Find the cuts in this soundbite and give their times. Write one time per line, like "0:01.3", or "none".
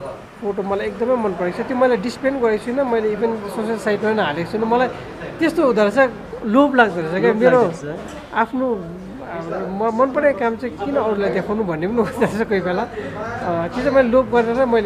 none